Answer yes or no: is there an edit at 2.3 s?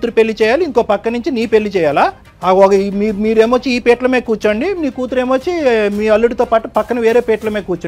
yes